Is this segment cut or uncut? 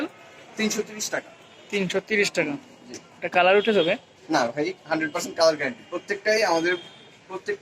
uncut